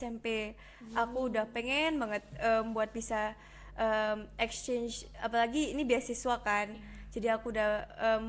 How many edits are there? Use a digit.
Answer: 0